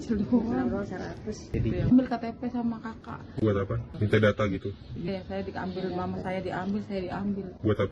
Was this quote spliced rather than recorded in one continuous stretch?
yes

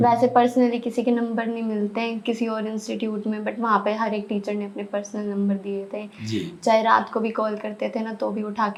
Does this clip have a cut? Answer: no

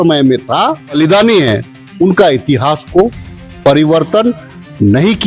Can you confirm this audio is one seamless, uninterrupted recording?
no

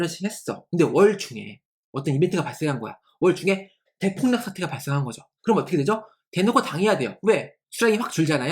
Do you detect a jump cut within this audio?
yes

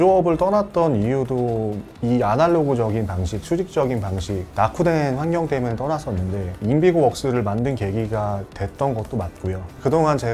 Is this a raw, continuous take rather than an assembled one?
yes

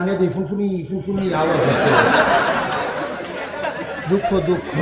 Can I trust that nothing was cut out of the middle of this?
yes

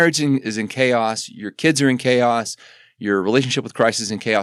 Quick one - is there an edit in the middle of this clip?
no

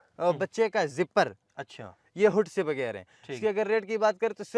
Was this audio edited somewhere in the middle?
no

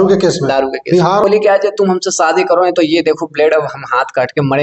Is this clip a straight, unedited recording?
no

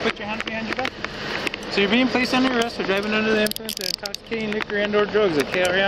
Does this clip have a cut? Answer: no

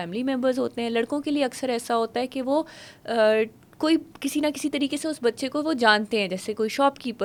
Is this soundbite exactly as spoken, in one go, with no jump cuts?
yes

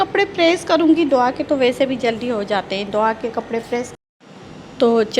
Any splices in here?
yes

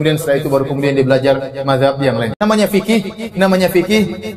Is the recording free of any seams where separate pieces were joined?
no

